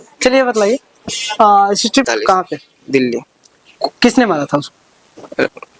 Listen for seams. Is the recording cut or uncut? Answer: cut